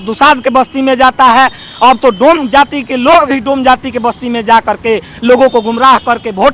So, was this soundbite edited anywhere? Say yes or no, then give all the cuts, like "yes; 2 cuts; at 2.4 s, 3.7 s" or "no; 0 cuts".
no; 0 cuts